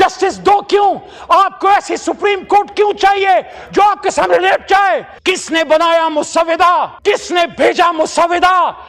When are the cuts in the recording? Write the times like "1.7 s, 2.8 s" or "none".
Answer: 5.1 s